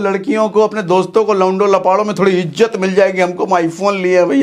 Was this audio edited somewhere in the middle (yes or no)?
no